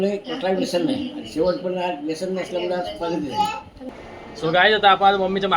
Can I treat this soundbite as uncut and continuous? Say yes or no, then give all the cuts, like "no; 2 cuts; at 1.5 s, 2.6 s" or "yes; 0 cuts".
no; 1 cut; at 3.8 s